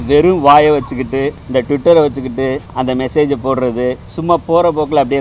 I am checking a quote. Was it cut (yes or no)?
yes